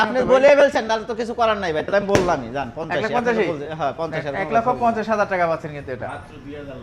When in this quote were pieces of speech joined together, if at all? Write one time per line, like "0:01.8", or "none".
none